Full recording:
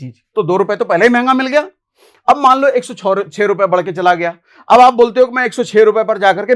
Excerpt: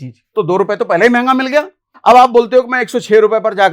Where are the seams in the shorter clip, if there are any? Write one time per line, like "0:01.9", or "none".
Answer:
0:01.8

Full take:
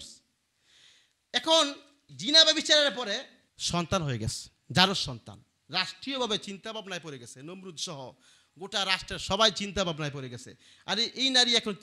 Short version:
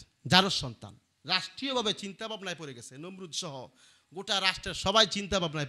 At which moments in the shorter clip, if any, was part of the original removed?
none

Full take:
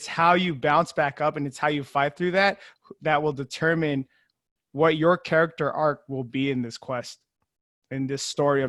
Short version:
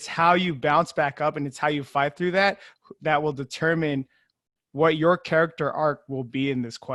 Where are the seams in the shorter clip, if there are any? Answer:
none

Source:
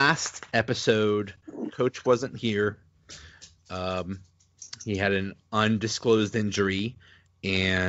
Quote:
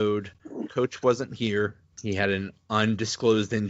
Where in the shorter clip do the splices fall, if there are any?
0:01.9

